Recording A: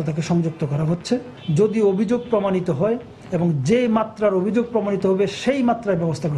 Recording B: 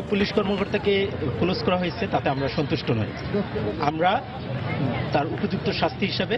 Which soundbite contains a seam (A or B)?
A